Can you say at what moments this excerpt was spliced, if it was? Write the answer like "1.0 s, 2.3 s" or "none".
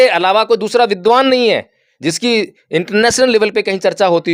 none